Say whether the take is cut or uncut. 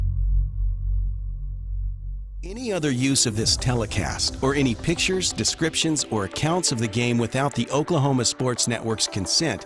cut